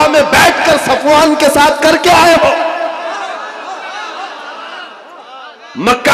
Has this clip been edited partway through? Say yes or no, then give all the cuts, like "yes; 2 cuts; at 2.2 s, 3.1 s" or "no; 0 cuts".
no; 0 cuts